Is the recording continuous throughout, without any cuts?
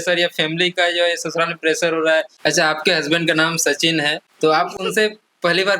no; 2 cuts; at 2.3 s, 4.2 s

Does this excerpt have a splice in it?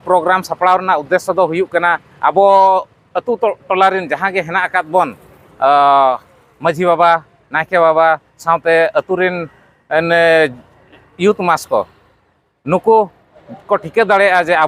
no; 0 cuts

